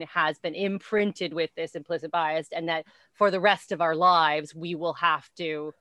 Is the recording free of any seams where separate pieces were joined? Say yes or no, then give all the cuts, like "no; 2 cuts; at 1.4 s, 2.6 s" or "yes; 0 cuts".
yes; 0 cuts